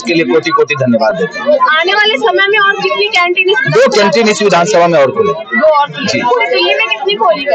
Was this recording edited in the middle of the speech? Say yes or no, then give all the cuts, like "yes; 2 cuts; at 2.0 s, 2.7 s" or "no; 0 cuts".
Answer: no; 0 cuts